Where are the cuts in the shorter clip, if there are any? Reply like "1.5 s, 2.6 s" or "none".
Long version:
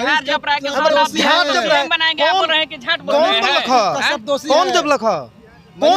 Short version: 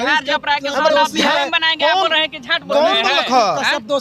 1.3 s